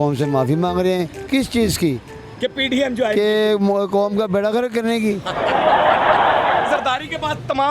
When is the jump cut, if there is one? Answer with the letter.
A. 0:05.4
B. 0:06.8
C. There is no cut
B